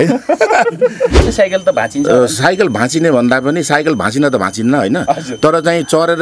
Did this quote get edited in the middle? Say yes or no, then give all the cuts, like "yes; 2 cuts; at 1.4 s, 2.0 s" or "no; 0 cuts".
yes; 1 cut; at 1.2 s